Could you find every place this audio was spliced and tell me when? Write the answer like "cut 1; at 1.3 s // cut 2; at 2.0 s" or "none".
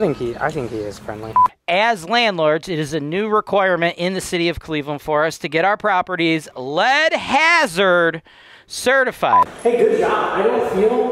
cut 1; at 1.6 s // cut 2; at 9.4 s